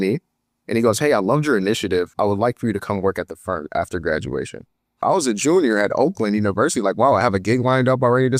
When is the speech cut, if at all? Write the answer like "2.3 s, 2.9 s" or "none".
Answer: none